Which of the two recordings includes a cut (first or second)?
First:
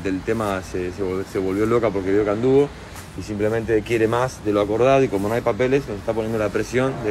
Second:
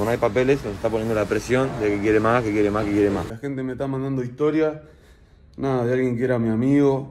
second